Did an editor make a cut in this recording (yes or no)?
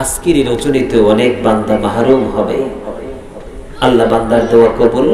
no